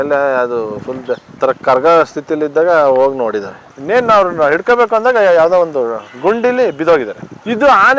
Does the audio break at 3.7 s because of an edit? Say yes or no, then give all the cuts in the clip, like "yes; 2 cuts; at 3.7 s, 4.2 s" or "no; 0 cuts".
yes; 1 cut; at 3.7 s